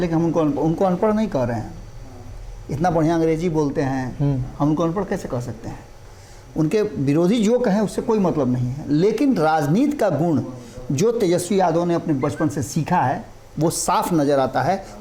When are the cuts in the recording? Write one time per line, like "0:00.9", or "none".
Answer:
none